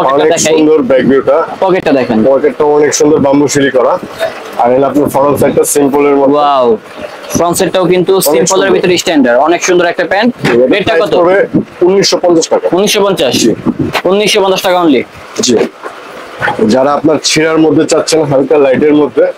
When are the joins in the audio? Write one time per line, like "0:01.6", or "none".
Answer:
none